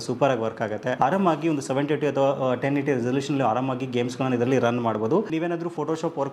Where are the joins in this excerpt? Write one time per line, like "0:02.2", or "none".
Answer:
0:01.0
0:05.3